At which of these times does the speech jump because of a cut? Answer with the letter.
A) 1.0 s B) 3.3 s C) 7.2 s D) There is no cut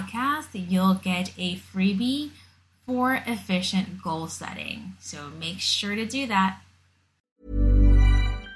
C